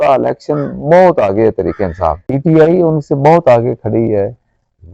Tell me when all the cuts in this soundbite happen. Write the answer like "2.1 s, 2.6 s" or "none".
2.3 s